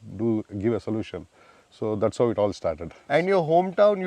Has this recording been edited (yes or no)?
no